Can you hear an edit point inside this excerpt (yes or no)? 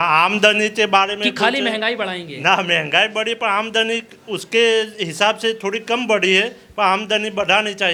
no